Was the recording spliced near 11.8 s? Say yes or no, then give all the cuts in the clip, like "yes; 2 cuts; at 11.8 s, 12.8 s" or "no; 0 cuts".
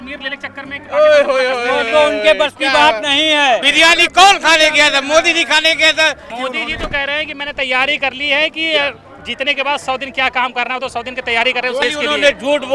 yes; 3 cuts; at 3.7 s, 6.3 s, 11.8 s